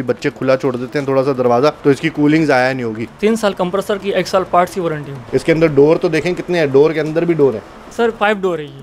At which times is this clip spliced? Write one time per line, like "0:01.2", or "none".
0:01.8
0:03.0
0:05.1
0:07.8